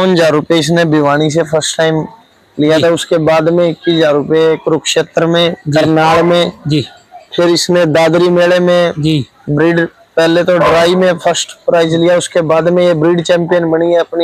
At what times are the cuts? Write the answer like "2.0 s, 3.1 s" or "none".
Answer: none